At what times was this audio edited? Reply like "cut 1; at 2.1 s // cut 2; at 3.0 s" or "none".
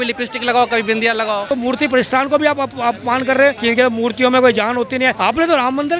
cut 1; at 1.5 s // cut 2; at 3.6 s // cut 3; at 5.1 s